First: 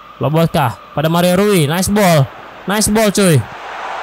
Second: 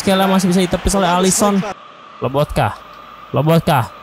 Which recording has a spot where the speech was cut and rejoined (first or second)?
second